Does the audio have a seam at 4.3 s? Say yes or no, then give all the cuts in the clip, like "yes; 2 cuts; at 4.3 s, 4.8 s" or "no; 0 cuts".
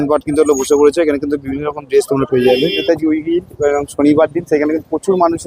no; 1 cut; at 2.8 s